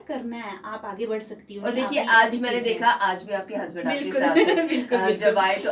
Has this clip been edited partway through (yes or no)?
no